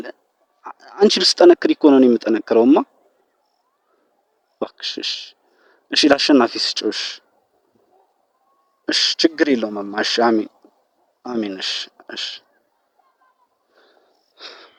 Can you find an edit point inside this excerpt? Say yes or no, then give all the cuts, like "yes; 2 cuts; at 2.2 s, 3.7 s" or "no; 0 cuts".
no; 0 cuts